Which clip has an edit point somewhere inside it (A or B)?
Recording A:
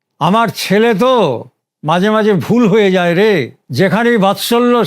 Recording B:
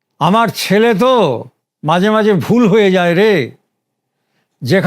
A